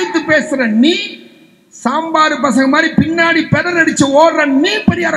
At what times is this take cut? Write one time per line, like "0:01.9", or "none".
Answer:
none